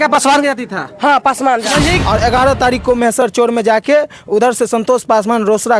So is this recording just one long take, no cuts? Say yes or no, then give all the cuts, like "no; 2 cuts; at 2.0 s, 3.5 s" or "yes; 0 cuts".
no; 1 cut; at 2.0 s